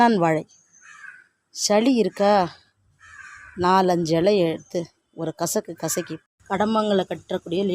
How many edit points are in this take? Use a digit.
1